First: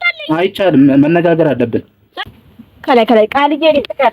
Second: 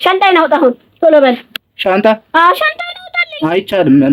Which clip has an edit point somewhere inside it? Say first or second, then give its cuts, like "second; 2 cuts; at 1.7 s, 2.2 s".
first; 1 cut; at 2.3 s